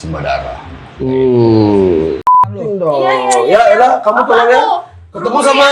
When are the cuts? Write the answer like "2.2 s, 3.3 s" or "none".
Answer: 2.5 s